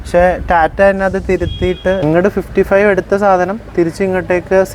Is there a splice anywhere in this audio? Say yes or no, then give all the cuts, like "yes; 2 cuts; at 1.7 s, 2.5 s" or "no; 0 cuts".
yes; 1 cut; at 2.0 s